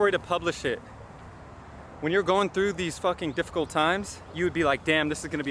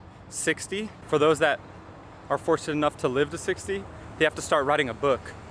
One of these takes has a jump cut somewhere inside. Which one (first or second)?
second